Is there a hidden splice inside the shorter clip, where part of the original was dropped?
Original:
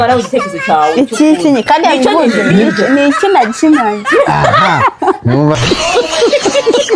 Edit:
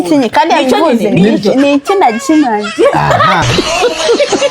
yes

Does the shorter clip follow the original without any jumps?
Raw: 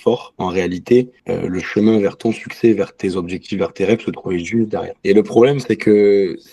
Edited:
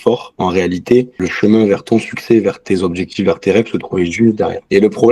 no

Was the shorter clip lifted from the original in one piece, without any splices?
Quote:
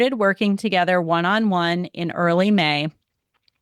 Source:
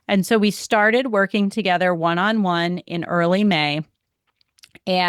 yes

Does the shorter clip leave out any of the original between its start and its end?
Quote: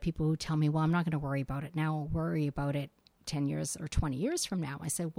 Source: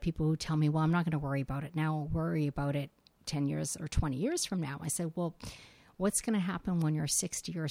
no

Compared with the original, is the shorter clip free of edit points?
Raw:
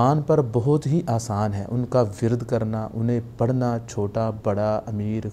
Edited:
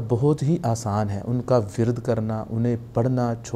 yes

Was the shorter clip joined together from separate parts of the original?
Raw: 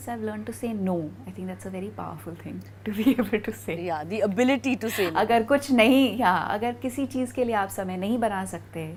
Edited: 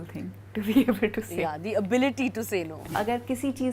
yes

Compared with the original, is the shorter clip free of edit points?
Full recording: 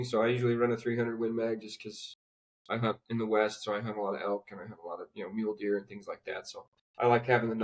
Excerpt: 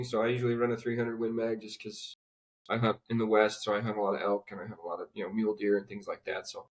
yes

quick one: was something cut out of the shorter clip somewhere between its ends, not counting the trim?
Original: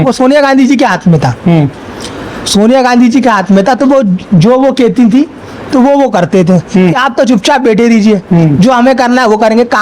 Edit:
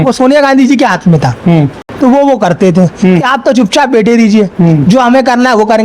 yes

